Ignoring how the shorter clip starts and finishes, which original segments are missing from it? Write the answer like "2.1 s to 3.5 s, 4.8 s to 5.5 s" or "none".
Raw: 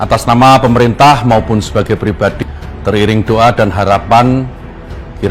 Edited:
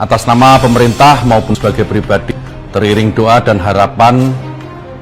1.5 s to 1.6 s